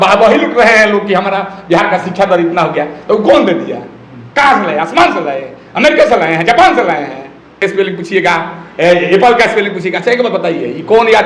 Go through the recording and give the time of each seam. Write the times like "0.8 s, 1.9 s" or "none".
7.6 s